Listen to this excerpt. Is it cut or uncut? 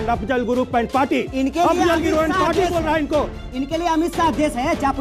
uncut